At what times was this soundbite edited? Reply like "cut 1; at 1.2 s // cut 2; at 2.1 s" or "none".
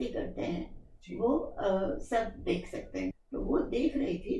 cut 1; at 3.1 s